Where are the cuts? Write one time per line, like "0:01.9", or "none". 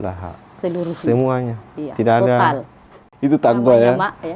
0:03.0